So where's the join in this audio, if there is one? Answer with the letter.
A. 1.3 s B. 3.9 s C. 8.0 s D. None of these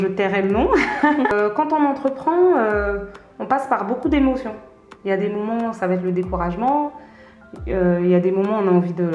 A